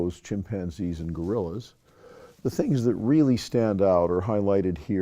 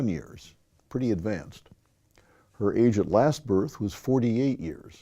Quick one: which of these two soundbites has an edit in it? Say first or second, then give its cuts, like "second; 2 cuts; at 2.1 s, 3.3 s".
second; 1 cut; at 2.8 s